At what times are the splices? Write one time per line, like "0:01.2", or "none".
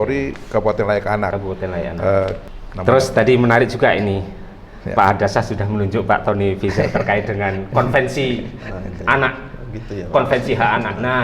0:02.5